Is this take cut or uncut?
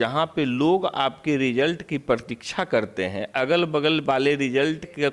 uncut